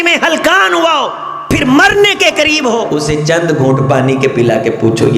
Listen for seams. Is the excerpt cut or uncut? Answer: cut